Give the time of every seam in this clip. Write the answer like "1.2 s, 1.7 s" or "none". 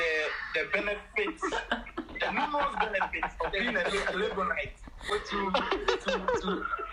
none